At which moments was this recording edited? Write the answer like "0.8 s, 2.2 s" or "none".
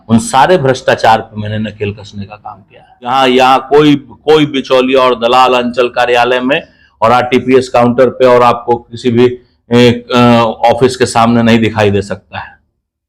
3.1 s